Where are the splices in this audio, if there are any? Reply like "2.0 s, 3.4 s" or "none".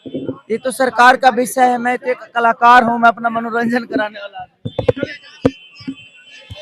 none